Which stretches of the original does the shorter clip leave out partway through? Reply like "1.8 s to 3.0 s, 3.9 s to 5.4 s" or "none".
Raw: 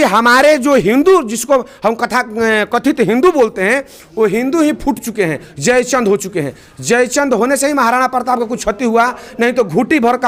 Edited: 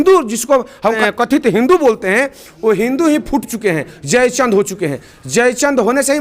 2.0 s to 2.6 s